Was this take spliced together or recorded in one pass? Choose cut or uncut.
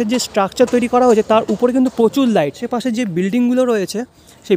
cut